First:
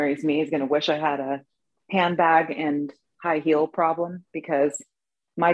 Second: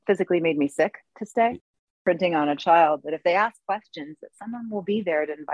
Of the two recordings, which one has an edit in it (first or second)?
second